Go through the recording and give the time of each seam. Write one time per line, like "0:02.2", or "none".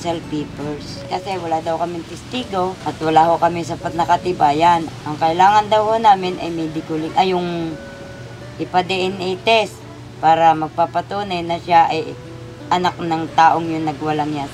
0:01.0
0:02.8
0:04.9